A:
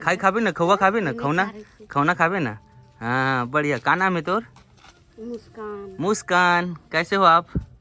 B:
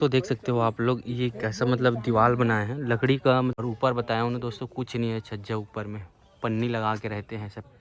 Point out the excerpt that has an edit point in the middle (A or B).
B